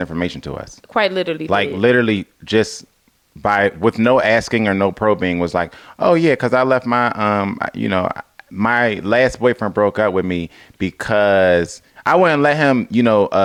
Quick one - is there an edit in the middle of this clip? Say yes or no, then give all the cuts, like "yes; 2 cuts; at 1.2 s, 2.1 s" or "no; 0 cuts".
no; 0 cuts